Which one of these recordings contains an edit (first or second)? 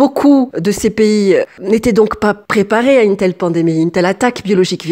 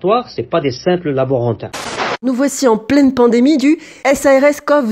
second